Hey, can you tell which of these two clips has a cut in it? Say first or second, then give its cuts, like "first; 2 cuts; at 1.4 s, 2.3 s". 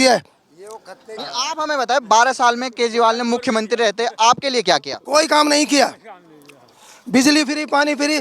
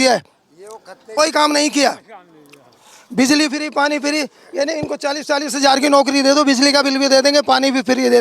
second; 1 cut; at 1.0 s